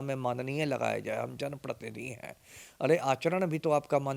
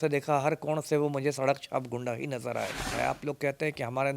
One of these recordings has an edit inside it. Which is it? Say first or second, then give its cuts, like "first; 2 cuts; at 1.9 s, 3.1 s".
second; 1 cut; at 2.9 s